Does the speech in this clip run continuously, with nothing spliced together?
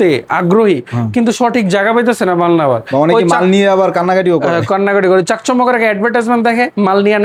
yes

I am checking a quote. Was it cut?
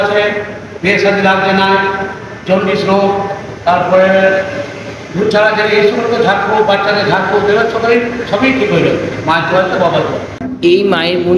no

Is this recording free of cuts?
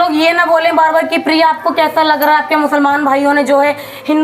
yes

